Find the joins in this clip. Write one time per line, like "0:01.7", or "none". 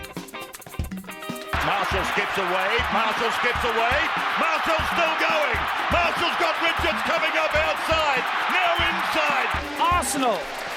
0:01.3